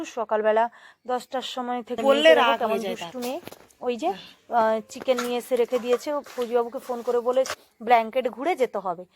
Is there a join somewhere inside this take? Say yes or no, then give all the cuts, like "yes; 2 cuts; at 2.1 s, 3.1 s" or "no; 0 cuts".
yes; 2 cuts; at 2.0 s, 7.5 s